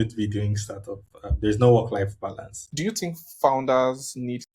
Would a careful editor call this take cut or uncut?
cut